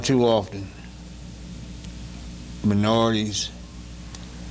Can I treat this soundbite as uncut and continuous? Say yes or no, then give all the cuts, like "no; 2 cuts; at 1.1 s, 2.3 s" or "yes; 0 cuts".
yes; 0 cuts